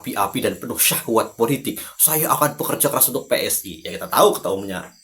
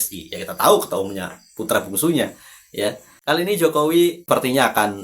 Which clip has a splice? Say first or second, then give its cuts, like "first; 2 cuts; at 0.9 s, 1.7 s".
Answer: second; 1 cut; at 2.8 s